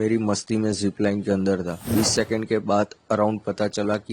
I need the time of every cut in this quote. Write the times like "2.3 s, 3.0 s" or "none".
1.9 s